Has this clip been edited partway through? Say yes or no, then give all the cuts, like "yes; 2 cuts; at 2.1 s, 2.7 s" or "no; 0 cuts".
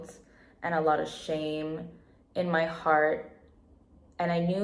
no; 0 cuts